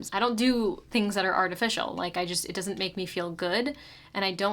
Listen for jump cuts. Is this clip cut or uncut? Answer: uncut